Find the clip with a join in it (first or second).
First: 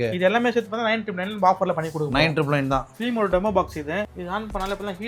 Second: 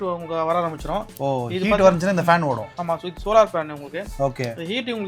first